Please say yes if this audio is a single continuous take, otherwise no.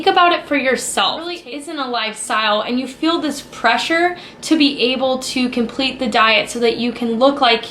no